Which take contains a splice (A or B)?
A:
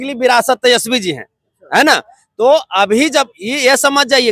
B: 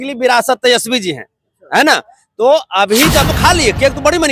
B